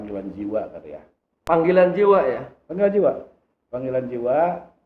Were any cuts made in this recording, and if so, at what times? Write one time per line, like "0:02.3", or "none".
0:01.3